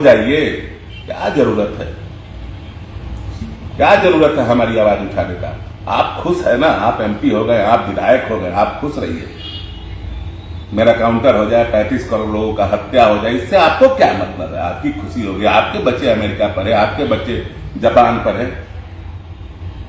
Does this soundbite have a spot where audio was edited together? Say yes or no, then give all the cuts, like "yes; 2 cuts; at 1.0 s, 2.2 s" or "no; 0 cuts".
no; 0 cuts